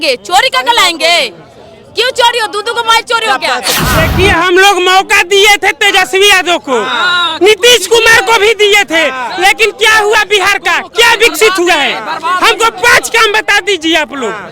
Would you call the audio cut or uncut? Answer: cut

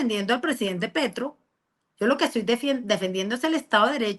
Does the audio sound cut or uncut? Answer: uncut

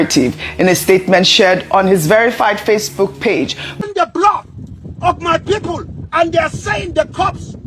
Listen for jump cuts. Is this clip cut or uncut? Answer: cut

